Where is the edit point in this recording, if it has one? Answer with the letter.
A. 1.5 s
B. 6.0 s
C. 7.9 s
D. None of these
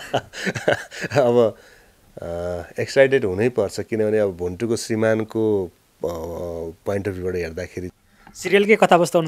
C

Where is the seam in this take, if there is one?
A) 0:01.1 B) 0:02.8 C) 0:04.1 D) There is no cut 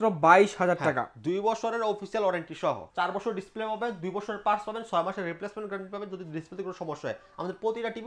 B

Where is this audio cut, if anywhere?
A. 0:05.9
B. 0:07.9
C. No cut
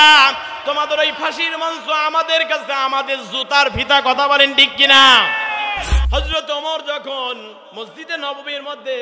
A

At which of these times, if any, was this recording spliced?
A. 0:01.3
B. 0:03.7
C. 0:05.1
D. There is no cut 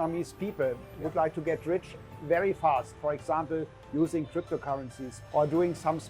C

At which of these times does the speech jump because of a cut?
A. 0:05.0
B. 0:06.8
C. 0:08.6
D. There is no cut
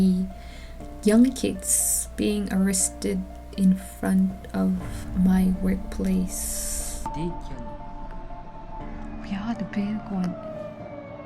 B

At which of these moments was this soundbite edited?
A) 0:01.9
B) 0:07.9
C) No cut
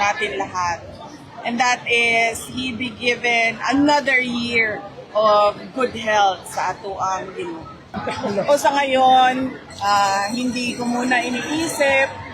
B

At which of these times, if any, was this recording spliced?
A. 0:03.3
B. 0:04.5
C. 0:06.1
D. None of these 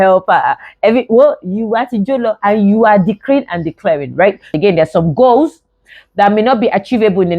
B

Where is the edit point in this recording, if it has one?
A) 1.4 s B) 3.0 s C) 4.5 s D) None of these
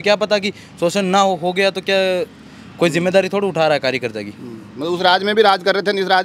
D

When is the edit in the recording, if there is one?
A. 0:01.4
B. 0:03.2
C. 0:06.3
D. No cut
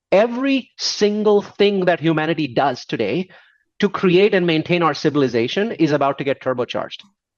D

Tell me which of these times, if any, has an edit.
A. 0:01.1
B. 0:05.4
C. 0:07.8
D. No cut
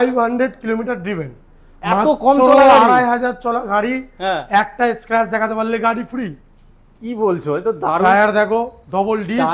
D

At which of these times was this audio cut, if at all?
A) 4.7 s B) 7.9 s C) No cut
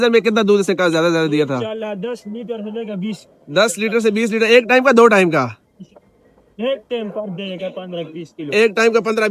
C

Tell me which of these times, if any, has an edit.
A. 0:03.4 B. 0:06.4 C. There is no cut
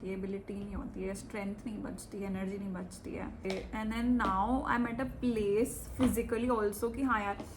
A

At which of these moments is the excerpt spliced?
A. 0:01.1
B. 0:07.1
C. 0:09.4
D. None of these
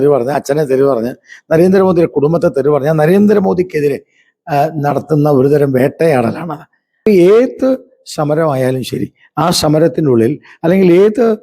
B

